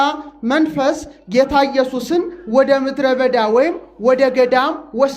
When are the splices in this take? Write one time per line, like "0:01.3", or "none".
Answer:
none